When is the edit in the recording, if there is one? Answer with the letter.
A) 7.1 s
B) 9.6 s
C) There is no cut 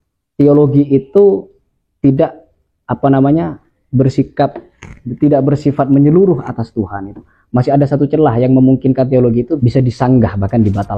B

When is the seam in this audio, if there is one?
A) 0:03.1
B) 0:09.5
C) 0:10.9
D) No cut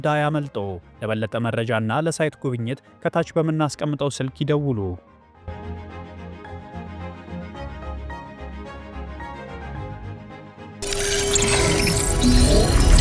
C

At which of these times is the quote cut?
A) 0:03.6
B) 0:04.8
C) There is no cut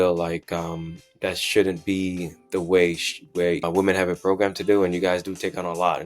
A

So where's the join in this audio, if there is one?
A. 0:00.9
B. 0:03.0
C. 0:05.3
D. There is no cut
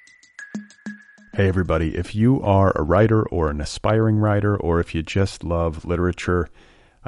A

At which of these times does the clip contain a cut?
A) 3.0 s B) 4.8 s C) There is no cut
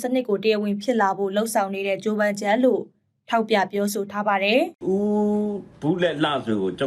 B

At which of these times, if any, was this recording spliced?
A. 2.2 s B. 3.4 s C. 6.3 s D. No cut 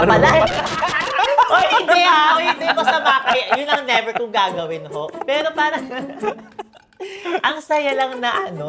D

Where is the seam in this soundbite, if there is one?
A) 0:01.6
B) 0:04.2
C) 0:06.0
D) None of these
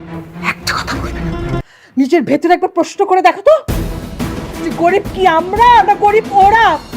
A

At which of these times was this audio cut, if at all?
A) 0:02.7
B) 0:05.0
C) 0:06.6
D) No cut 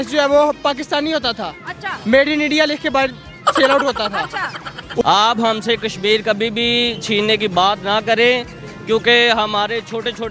B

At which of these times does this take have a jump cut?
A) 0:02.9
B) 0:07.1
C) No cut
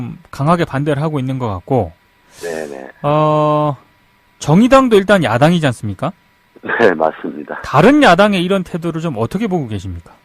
A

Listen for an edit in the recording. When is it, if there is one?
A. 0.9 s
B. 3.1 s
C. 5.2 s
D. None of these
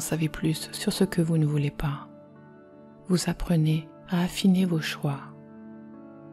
C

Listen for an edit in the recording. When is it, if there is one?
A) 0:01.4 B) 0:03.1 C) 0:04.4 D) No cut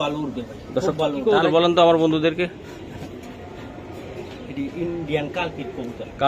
A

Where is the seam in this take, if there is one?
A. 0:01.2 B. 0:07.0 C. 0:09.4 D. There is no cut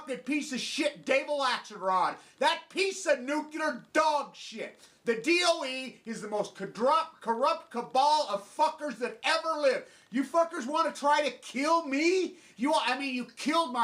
A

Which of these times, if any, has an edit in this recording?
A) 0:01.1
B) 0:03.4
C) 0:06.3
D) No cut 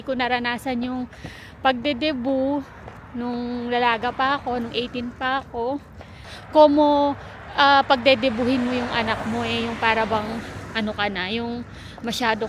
C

